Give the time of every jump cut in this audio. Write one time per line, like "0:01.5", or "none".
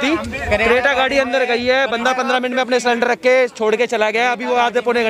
none